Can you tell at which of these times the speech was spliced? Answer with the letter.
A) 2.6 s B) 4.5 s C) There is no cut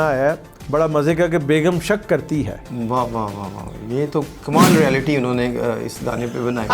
A